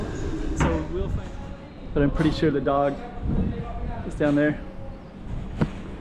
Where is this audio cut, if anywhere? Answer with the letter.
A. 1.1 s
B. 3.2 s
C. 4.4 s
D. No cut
A